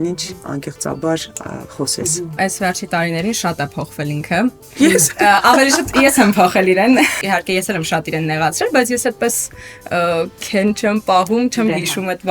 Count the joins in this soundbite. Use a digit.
2